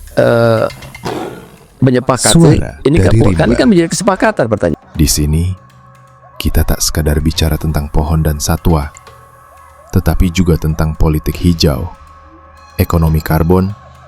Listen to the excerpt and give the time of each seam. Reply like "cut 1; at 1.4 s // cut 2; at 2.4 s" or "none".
cut 1; at 4.7 s